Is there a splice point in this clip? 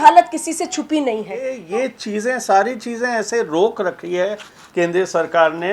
yes; 1 cut; at 1.6 s

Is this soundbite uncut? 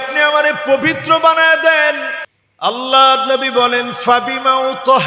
no; 1 cut; at 2.3 s

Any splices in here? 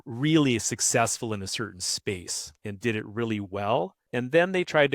yes; 2 cuts; at 2.4 s, 4.0 s

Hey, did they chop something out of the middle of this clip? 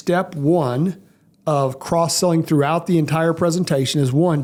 no; 0 cuts

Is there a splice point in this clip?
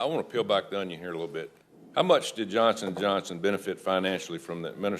yes; 1 cut; at 1.5 s

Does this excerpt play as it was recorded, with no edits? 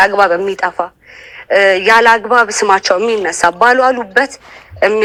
yes; 0 cuts

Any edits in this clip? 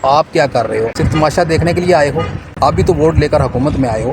yes; 1 cut; at 1.0 s

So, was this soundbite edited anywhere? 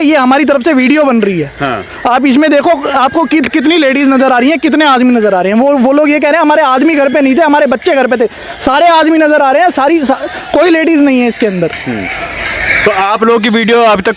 no; 0 cuts

